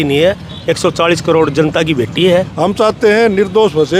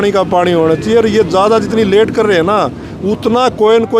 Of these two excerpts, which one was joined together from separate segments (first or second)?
first